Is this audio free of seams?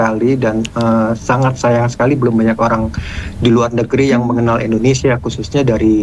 yes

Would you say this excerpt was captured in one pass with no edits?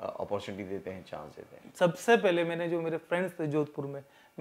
no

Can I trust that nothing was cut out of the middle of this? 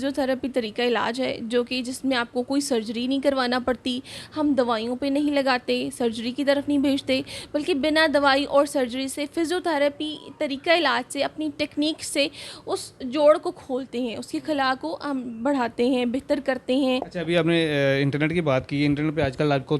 no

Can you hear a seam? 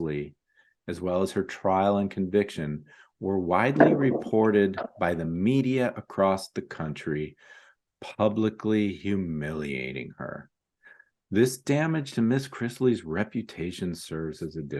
no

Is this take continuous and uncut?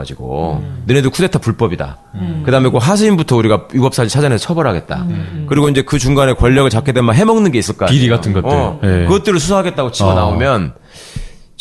no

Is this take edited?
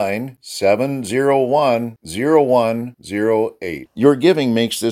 no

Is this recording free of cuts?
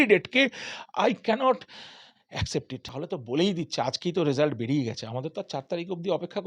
no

